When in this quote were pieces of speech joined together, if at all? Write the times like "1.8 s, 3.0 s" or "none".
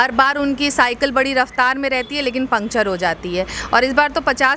none